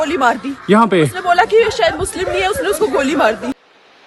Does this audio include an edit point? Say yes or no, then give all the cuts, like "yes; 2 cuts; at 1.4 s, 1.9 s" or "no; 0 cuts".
no; 0 cuts